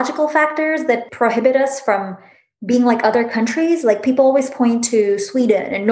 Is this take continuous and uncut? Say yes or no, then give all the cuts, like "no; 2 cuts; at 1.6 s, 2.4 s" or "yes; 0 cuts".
no; 1 cut; at 1.1 s